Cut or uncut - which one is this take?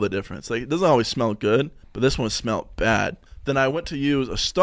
cut